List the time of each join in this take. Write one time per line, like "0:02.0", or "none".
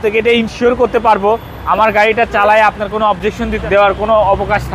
0:03.6